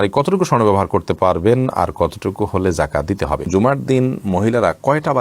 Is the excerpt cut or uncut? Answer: cut